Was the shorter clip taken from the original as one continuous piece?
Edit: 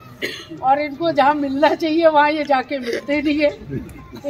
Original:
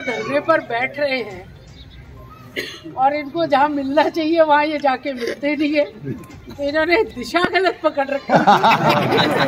yes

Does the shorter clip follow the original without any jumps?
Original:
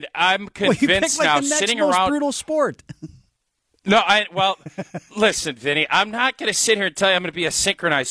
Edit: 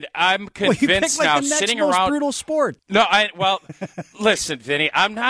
no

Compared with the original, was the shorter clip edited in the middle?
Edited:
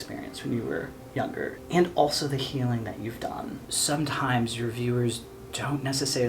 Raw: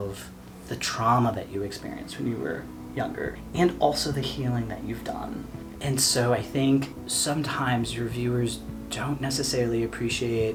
yes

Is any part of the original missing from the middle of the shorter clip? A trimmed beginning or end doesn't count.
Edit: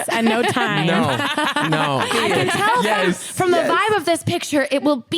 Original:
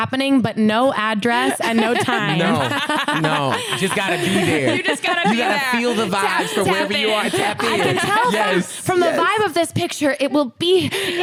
yes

